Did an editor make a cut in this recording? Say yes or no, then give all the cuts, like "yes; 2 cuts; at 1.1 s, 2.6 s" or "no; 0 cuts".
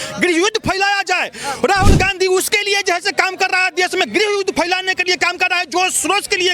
no; 0 cuts